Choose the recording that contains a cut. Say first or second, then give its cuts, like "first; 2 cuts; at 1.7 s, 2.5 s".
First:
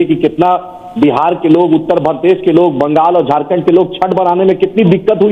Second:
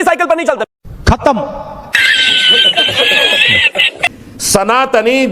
second; 1 cut; at 3.9 s